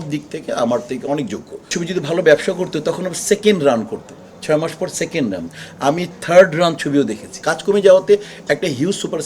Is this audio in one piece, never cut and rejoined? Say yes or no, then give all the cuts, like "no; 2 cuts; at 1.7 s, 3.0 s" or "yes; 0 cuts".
no; 2 cuts; at 1.7 s, 7.5 s